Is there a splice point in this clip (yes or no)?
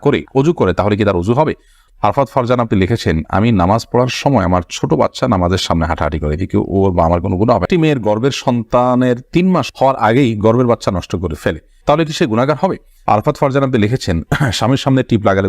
yes